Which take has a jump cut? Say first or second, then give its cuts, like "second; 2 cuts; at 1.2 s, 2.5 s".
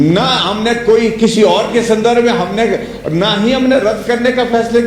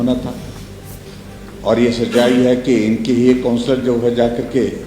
second; 1 cut; at 1.1 s